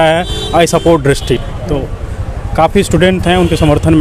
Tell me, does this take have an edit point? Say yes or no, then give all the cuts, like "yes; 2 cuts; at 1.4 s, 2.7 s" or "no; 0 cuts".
no; 0 cuts